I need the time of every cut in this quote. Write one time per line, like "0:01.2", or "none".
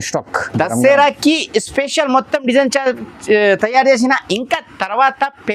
none